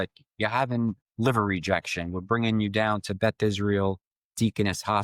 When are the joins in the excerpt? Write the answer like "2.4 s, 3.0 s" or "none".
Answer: 1.1 s